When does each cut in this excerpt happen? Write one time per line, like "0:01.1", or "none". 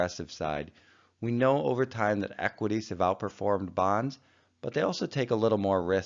0:05.1